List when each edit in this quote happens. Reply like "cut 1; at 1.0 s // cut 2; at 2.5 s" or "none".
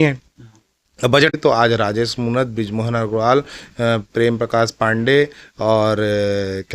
cut 1; at 1.3 s